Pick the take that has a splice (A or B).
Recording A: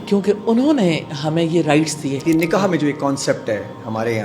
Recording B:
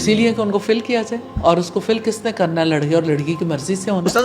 A